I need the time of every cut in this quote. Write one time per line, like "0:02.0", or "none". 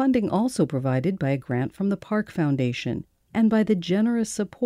0:03.1